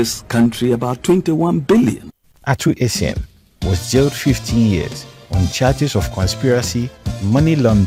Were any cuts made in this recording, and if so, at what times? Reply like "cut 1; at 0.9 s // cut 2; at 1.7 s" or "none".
none